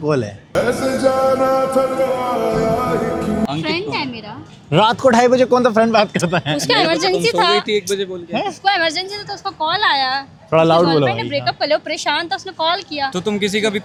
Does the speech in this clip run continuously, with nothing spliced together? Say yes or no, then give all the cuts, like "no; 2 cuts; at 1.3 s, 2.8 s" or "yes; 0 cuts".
yes; 0 cuts